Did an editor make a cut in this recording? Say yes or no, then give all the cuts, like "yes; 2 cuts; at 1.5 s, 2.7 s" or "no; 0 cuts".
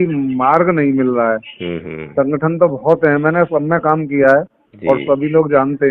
no; 0 cuts